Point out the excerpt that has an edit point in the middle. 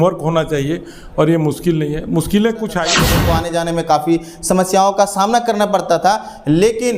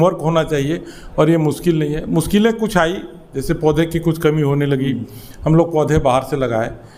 first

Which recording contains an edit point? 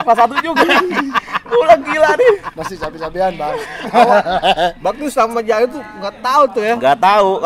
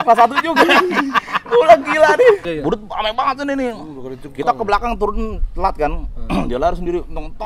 second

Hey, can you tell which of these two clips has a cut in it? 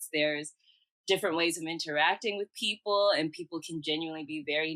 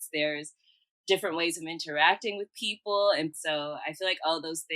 second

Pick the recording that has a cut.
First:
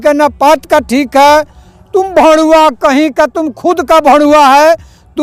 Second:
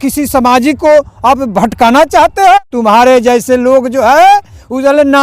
second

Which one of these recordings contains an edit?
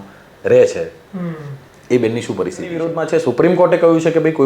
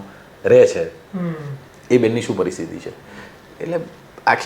first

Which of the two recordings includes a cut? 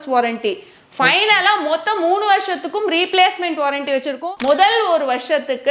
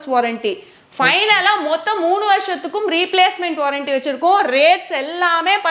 first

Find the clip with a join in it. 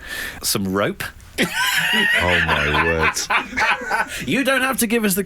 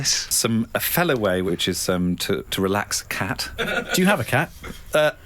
second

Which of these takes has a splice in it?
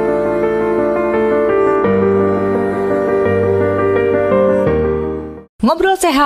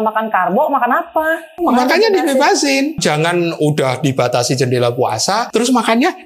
second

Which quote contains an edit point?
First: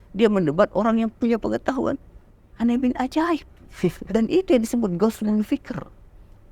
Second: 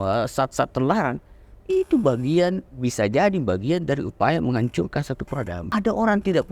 second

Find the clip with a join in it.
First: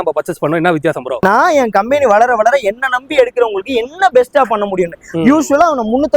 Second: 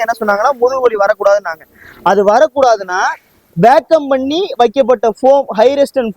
first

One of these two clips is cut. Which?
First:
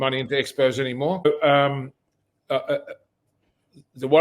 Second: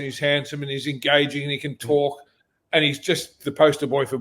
first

